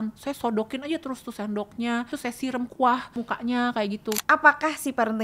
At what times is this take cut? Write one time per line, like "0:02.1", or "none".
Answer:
0:02.1
0:03.1
0:04.2